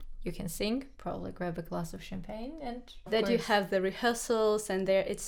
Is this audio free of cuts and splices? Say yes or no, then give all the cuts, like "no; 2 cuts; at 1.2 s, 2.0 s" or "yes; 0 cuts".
no; 1 cut; at 3.0 s